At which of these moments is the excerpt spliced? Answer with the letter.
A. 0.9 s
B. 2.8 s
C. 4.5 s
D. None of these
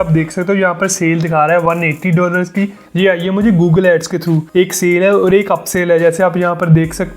B